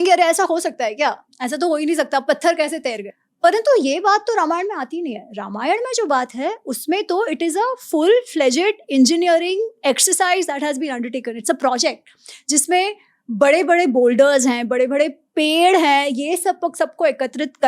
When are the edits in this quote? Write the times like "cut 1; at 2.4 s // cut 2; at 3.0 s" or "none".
cut 1; at 3.1 s